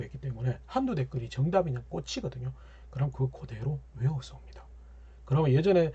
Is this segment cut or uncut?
uncut